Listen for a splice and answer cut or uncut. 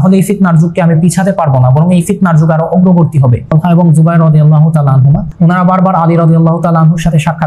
cut